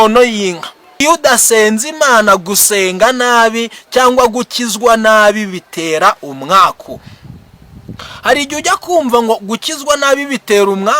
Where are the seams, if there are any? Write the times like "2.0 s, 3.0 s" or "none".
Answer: 1.0 s